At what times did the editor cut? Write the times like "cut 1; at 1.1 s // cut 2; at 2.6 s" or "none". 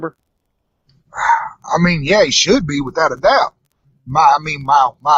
none

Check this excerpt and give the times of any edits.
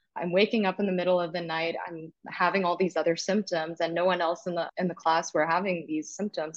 cut 1; at 4.7 s

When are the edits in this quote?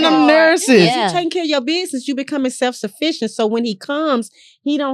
none

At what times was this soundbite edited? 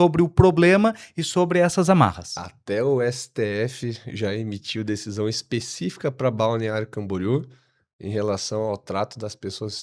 none

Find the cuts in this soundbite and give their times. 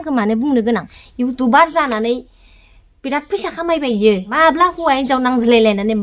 cut 1; at 1.0 s // cut 2; at 4.3 s

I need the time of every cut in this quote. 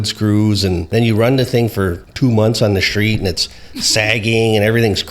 cut 1; at 0.8 s // cut 2; at 2.0 s

